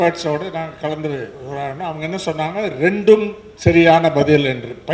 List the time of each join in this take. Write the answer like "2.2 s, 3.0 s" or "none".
none